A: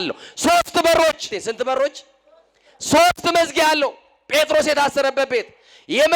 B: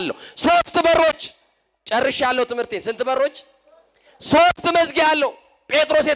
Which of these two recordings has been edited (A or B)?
A